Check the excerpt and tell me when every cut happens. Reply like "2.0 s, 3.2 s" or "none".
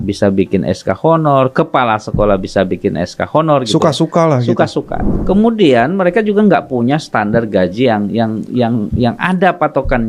5.1 s